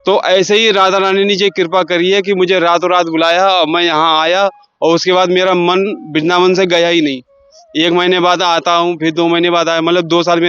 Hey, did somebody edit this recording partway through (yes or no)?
no